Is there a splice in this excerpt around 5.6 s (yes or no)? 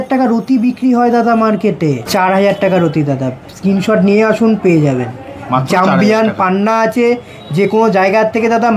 no